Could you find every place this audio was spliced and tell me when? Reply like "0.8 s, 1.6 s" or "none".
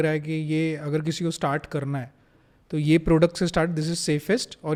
none